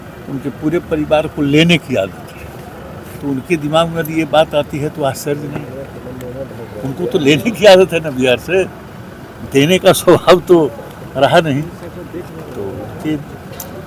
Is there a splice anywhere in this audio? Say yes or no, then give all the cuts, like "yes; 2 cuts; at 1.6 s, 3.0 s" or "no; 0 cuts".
no; 0 cuts